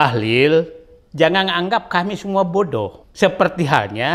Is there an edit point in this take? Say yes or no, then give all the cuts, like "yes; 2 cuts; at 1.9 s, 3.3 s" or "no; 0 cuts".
yes; 1 cut; at 3.0 s